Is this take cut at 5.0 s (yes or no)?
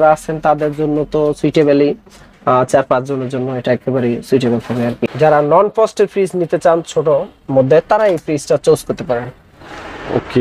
yes